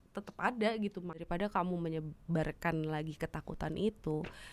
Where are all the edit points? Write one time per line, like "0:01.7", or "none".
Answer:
0:01.2